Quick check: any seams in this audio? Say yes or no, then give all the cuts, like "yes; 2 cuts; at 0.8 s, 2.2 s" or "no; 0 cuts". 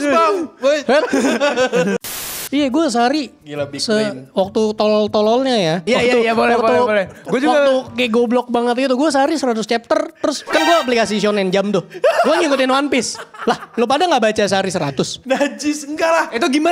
yes; 4 cuts; at 2.0 s, 5.8 s, 10.4 s, 15.2 s